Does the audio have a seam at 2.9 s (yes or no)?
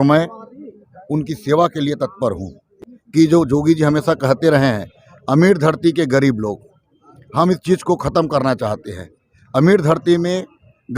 yes